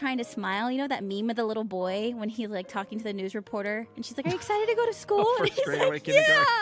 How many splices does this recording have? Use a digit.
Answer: 0